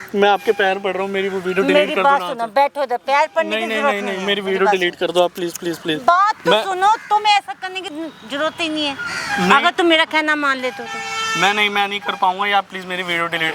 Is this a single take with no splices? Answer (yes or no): yes